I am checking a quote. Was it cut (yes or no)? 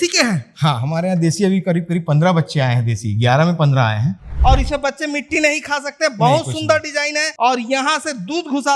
yes